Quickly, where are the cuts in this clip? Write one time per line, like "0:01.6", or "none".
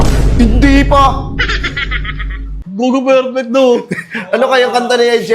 0:02.6